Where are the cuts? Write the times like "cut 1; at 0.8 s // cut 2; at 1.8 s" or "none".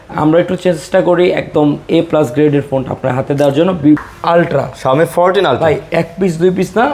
cut 1; at 4.0 s